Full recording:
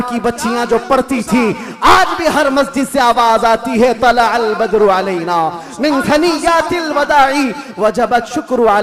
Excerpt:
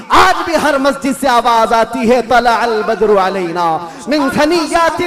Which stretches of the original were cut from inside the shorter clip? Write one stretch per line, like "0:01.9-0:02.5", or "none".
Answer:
none